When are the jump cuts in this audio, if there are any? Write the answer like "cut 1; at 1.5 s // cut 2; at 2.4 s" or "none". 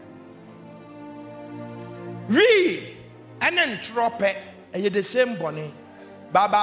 none

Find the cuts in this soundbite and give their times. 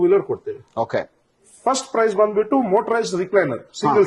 none

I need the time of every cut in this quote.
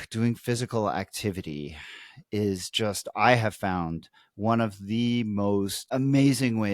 cut 1; at 5.8 s

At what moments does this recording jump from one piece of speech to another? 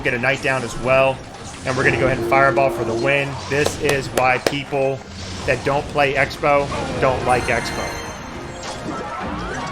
none

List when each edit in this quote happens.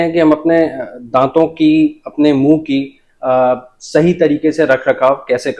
none

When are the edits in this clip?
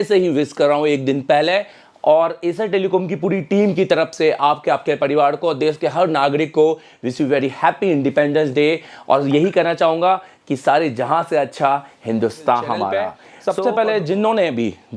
cut 1; at 13.1 s

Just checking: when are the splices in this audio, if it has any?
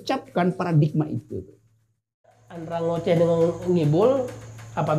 cut 1; at 2.4 s

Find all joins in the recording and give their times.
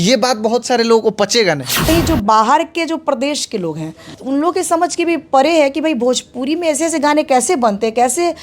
cut 1; at 1.8 s // cut 2; at 4.1 s

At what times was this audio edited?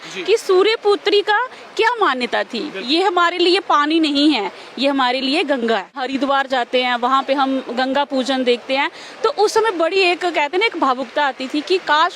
cut 1; at 6.0 s

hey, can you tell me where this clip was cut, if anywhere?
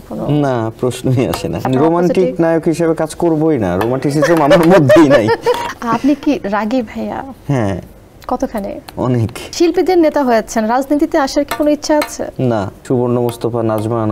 cut 1; at 1.7 s // cut 2; at 5.7 s // cut 3; at 9.4 s // cut 4; at 12.8 s

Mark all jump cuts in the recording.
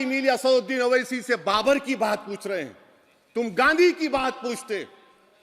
none

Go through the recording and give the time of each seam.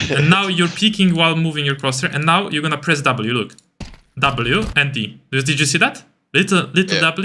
none

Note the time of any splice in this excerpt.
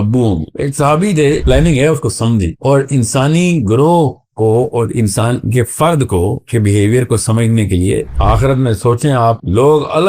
cut 1; at 1.4 s // cut 2; at 8.1 s

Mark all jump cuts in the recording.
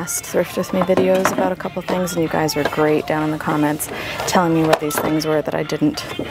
none

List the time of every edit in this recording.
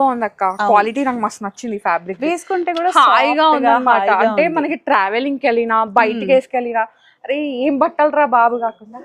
none

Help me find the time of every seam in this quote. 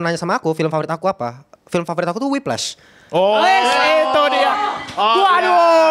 none

